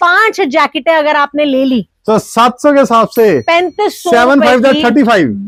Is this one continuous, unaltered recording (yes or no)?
yes